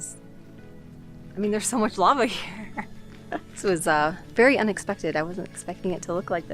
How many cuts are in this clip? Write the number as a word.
one